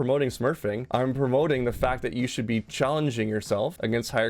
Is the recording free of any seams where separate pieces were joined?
yes; 0 cuts

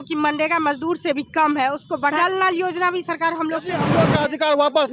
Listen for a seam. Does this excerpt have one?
yes; 2 cuts; at 2.2 s, 3.9 s

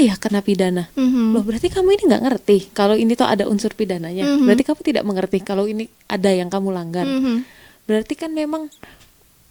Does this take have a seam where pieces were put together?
no; 0 cuts

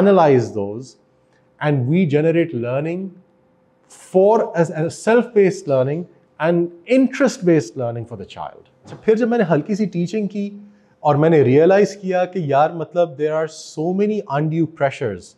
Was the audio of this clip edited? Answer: yes; 1 cut; at 9.0 s

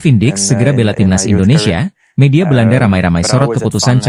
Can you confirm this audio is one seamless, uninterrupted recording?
yes; 0 cuts

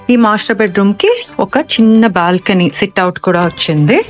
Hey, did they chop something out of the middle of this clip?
no; 0 cuts

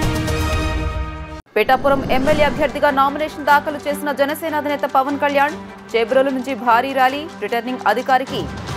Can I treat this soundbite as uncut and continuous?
no; 1 cut; at 1.3 s

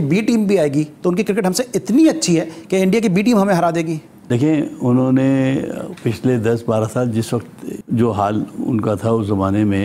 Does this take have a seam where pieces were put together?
no; 0 cuts

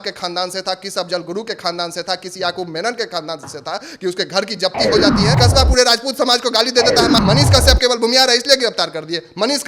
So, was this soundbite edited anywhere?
yes; 2 cuts; at 5.4 s, 7.2 s

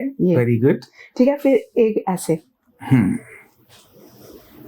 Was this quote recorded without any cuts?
yes; 0 cuts

